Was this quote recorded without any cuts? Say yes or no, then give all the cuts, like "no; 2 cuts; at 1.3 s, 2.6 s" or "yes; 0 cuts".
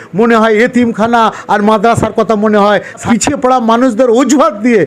no; 1 cut; at 3.0 s